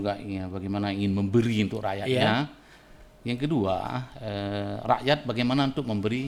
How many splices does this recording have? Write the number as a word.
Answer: zero